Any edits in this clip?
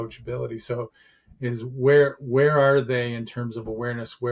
no; 0 cuts

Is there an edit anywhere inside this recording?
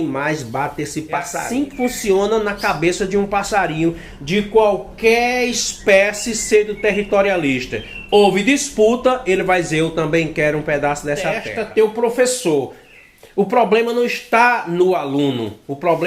yes; 2 cuts; at 1.4 s, 11.5 s

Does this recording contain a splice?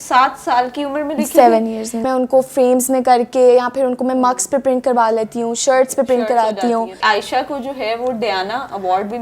yes; 2 cuts; at 2.1 s, 7.0 s

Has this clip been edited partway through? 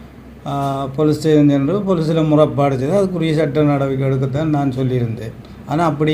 no; 0 cuts

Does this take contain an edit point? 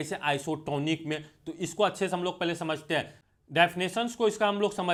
no; 0 cuts

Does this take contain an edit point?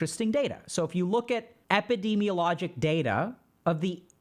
yes; 1 cut; at 1.5 s

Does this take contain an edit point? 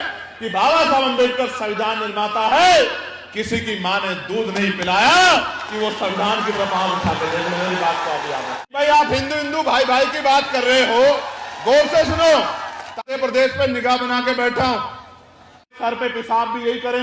yes; 3 cuts; at 8.6 s, 13.0 s, 15.8 s

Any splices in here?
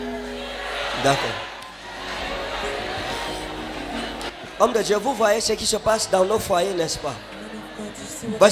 yes; 1 cut; at 1.5 s

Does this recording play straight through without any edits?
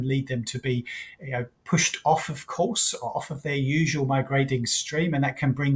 yes; 0 cuts

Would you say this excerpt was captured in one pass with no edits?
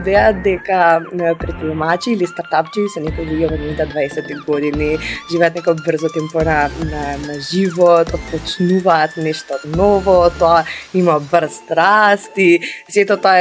yes; 0 cuts

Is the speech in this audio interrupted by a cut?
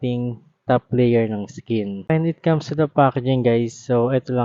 no; 0 cuts

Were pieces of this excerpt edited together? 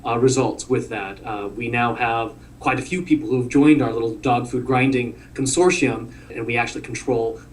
yes; 1 cut; at 6.3 s

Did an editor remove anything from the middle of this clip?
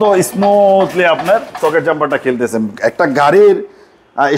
no; 0 cuts

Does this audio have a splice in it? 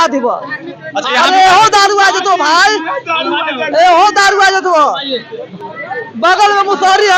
no; 0 cuts

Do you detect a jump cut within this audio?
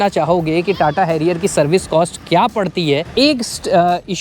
yes; 1 cut; at 3.1 s

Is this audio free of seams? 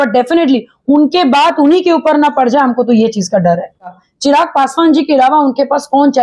no; 1 cut; at 4.0 s

